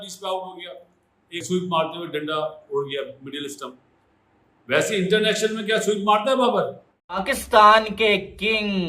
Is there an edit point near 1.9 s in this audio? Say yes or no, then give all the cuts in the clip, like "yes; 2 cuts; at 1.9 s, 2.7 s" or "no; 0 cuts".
no; 1 cut; at 7.4 s